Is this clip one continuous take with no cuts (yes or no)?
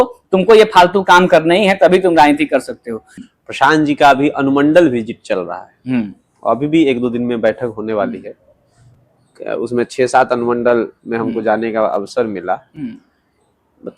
no